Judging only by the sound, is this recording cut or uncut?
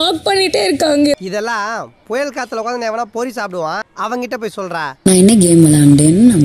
cut